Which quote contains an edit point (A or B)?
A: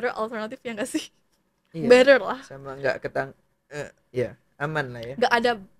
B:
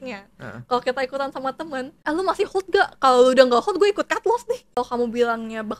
B